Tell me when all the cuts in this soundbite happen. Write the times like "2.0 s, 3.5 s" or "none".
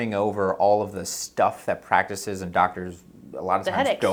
none